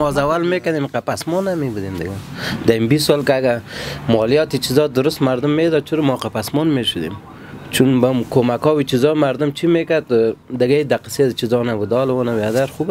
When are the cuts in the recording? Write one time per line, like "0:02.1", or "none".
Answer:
none